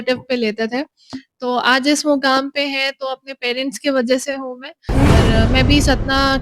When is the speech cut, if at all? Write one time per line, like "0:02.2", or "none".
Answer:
0:05.1